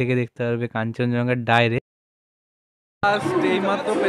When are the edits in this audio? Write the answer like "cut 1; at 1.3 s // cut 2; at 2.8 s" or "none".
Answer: cut 1; at 2.5 s